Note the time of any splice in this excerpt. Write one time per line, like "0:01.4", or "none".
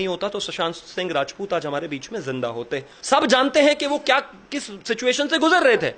0:02.9